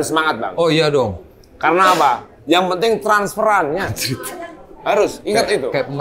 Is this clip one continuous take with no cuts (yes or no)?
no